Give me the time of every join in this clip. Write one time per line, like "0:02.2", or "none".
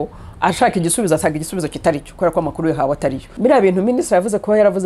0:03.3

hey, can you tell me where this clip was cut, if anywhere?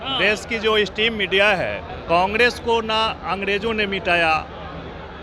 0:01.9

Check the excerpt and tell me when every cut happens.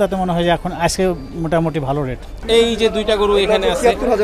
0:02.4

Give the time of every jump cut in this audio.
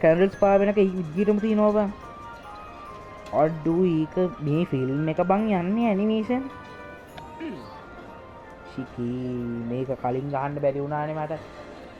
none

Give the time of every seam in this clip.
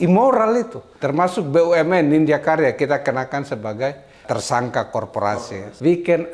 0:00.9
0:05.3

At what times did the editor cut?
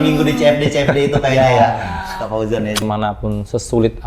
0:02.8

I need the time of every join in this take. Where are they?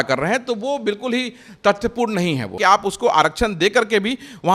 0:02.6

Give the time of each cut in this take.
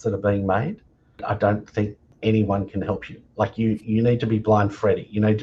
0:01.2
0:02.1

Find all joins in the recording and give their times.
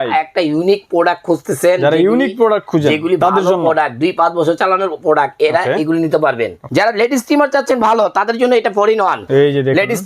0:06.6
0:09.2

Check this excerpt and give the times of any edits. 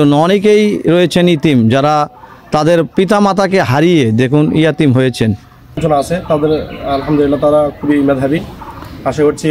0:05.8

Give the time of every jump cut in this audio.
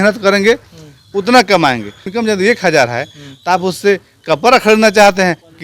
0:02.0

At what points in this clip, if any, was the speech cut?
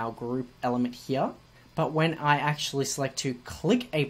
0:01.5

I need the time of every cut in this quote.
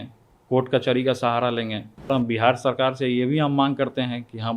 0:02.1

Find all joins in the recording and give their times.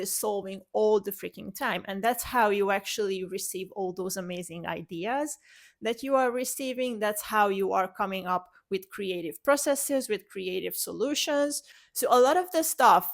0:11.7

